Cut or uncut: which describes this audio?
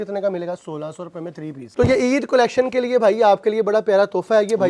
cut